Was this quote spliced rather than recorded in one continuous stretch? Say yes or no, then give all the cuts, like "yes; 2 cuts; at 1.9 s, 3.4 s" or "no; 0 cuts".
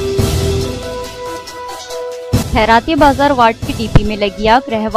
yes; 1 cut; at 1.1 s